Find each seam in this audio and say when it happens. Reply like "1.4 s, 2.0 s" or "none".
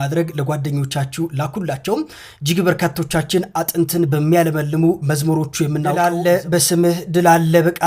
5.9 s